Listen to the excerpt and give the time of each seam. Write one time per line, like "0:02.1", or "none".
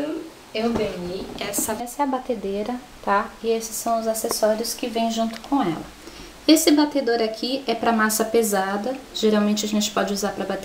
none